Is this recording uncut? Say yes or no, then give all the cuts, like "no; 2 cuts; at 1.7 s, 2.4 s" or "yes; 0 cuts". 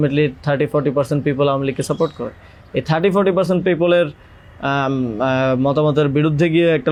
yes; 0 cuts